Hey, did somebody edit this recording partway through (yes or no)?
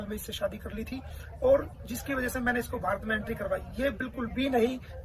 no